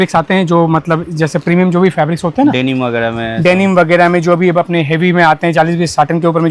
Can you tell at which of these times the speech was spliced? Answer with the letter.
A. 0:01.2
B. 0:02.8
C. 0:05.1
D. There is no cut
D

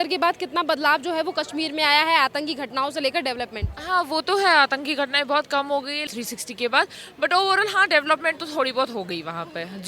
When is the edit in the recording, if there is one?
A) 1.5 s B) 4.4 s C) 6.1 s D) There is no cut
C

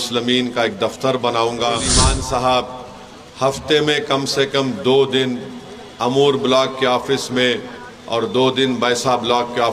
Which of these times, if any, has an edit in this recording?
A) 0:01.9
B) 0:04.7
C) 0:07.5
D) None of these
A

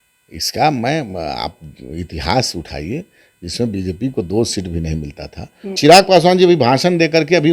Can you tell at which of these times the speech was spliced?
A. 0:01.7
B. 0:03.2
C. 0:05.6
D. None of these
C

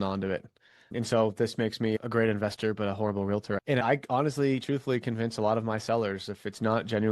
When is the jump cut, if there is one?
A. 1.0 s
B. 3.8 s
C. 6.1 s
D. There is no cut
B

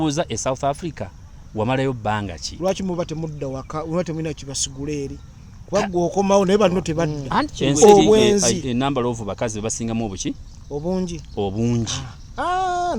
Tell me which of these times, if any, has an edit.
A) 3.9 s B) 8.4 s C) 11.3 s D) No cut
B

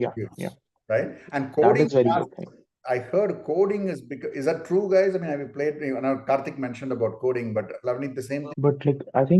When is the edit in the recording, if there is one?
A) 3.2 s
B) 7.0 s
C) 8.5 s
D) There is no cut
C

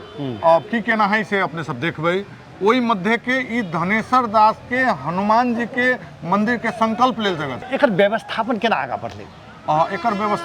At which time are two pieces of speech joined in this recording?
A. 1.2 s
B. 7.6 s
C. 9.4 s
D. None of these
B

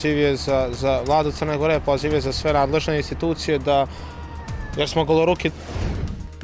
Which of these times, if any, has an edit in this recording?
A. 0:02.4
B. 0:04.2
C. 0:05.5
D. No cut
C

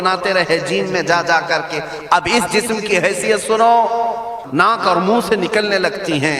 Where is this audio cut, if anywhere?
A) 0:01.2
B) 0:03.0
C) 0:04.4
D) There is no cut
C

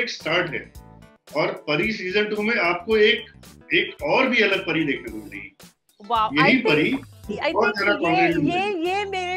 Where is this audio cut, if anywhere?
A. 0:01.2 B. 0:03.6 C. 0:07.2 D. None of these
D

